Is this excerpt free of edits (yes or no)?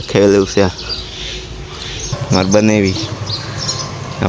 no